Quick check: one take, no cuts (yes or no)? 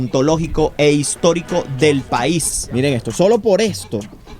no